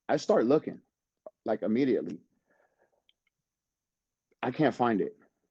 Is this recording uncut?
yes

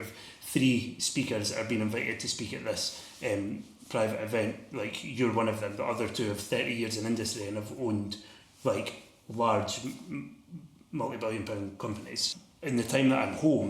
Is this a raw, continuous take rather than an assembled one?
no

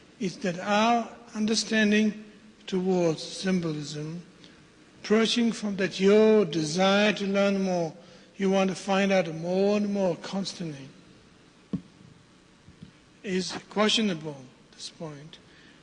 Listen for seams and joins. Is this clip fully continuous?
yes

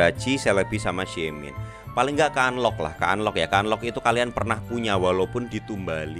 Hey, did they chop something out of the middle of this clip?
no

